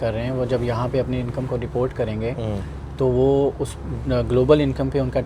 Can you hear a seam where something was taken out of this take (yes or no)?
no